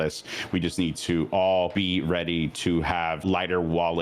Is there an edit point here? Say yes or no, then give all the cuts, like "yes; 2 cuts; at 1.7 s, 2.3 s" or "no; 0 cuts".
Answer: yes; 2 cuts; at 1.7 s, 3.2 s